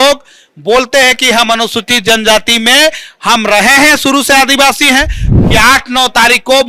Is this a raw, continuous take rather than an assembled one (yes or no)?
no